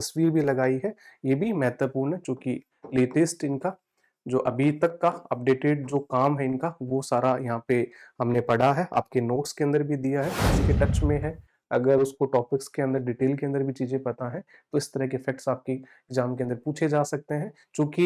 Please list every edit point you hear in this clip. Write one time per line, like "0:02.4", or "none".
0:10.5